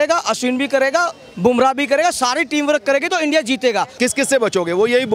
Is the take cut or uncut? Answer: cut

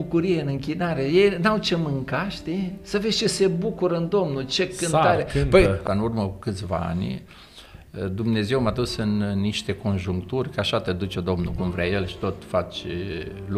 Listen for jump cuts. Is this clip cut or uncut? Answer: cut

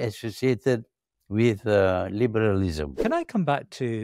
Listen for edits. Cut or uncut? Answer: cut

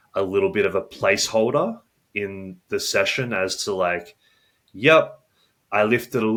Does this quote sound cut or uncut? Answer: uncut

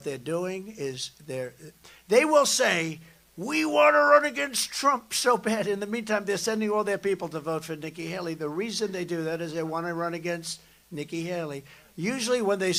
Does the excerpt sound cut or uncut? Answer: uncut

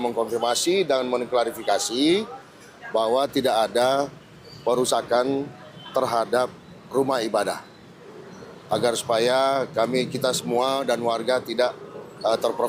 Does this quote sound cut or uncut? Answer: uncut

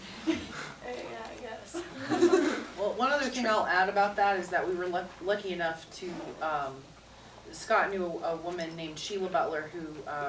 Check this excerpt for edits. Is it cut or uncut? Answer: cut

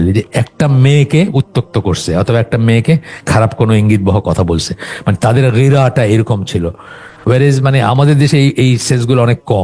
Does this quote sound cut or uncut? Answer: uncut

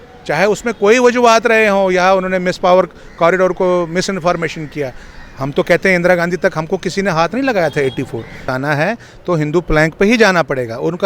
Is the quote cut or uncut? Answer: cut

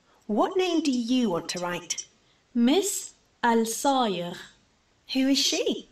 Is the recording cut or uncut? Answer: uncut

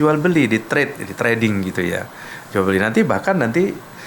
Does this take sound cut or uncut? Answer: uncut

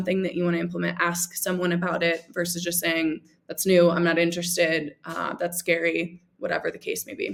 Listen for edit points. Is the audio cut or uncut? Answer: uncut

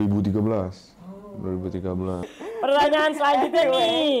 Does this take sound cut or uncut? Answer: uncut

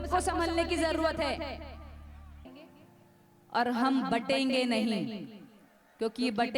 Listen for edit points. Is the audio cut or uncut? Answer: cut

